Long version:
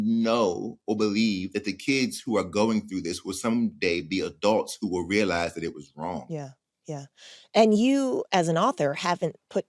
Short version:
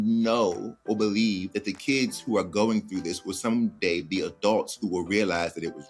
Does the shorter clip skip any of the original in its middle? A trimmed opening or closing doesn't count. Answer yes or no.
no